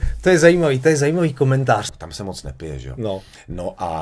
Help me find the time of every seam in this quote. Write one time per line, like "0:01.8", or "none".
0:01.9